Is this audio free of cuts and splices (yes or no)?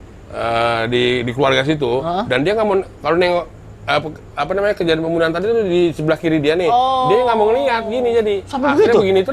yes